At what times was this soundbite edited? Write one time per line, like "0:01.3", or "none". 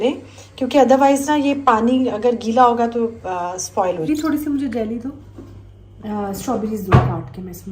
0:04.1